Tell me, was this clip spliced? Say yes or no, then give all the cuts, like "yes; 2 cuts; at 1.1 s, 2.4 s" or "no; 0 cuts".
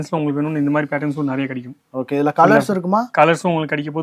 no; 0 cuts